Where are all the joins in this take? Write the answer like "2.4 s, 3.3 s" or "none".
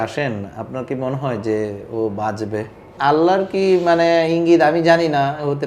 3.0 s